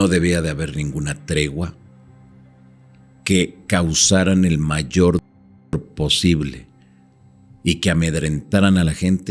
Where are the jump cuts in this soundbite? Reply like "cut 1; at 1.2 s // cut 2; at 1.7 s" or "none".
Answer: none